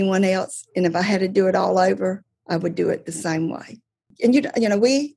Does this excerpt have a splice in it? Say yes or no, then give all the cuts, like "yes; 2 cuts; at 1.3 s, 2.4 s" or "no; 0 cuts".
yes; 1 cut; at 4.1 s